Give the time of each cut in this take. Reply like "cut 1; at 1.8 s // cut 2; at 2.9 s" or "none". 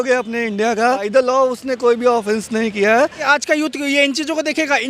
cut 1; at 1.1 s // cut 2; at 3.2 s